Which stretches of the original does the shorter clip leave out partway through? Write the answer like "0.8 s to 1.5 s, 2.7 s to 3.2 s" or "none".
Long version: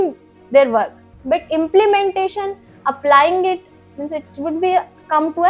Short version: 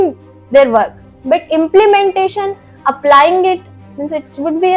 none